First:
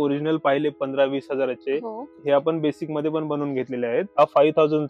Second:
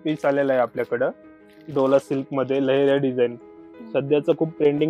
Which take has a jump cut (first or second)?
first